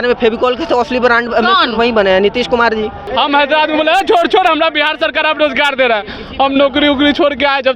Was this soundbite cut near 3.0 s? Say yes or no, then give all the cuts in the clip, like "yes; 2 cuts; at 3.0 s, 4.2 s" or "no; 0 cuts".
yes; 1 cut; at 3.0 s